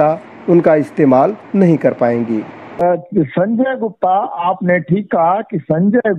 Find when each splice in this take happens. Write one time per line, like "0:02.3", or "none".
0:02.8